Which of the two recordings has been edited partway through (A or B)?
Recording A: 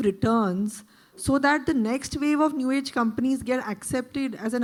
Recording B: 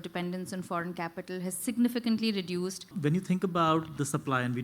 B